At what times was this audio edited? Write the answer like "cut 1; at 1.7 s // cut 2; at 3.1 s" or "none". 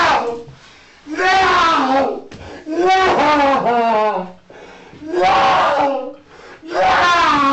none

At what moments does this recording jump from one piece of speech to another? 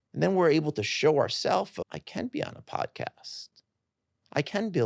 cut 1; at 1.8 s

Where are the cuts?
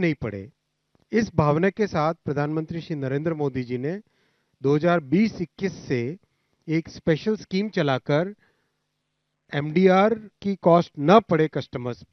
none

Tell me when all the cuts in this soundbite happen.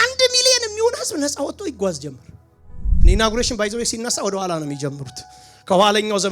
cut 1; at 2.9 s

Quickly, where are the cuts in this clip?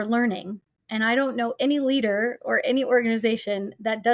none

